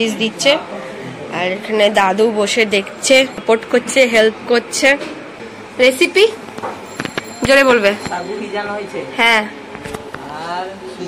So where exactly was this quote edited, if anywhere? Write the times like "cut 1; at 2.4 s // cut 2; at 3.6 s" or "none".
cut 1; at 3.3 s // cut 2; at 5.6 s